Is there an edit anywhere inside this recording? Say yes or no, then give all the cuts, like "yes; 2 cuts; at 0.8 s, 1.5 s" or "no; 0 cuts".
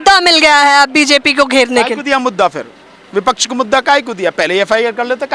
no; 0 cuts